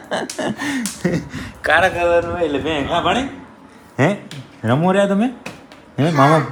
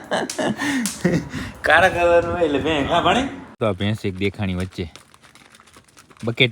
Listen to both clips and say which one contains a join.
second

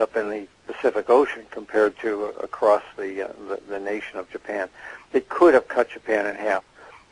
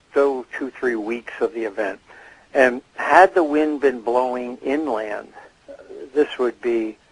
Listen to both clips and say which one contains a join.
second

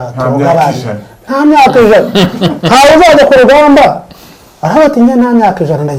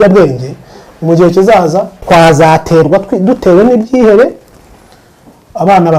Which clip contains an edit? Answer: second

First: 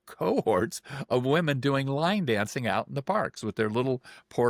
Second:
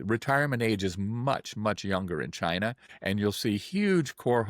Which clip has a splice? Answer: second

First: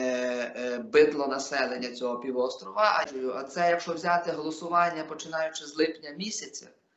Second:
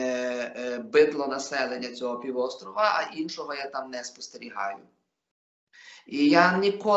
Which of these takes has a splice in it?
first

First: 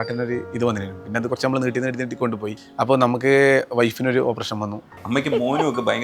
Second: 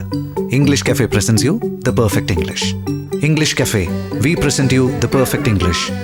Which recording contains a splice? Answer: first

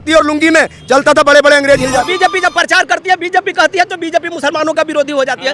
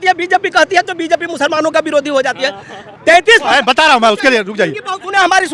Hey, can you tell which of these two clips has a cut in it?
first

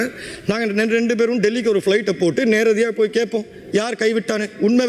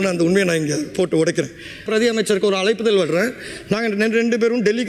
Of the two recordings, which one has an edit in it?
second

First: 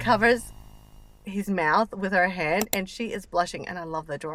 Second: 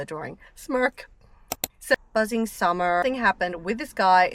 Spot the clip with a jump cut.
second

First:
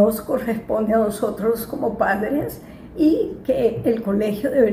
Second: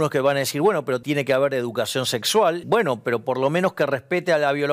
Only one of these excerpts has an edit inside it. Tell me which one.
second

